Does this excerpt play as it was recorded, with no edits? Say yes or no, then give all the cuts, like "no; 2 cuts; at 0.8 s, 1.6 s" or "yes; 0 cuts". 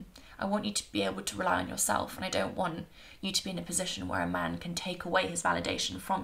yes; 0 cuts